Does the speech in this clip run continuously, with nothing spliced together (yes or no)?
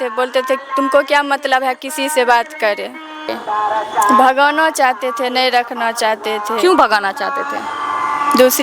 no